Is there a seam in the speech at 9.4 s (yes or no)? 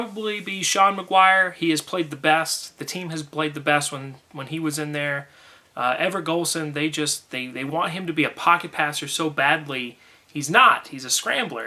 no